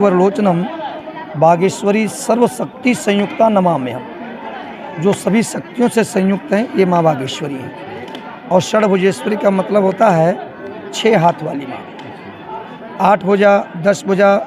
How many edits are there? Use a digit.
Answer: 0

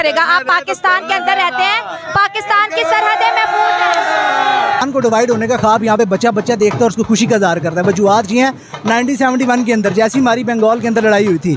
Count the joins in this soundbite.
1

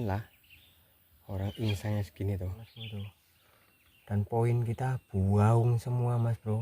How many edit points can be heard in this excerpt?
1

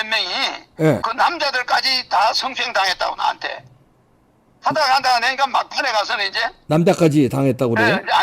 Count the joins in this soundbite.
1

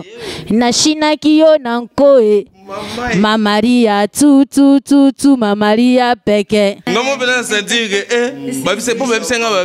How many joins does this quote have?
1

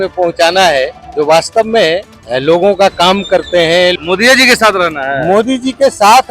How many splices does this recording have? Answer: 3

